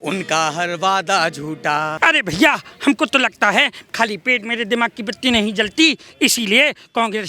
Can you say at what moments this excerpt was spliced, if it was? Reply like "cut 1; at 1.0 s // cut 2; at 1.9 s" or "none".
cut 1; at 1.9 s